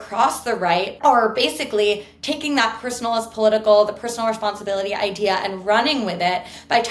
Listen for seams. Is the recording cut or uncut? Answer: cut